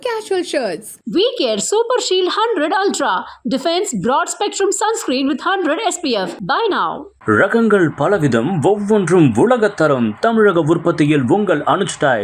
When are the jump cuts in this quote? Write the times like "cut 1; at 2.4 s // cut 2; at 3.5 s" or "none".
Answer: none